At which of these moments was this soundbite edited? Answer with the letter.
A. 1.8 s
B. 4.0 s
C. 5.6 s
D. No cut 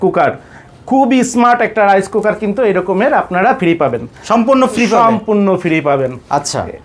D